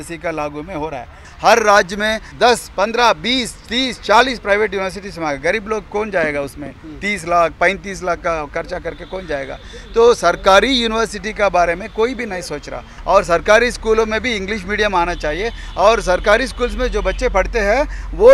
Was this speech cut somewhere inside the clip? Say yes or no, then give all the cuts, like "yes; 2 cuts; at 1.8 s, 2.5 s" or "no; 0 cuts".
yes; 3 cuts; at 1.2 s, 2.2 s, 12.9 s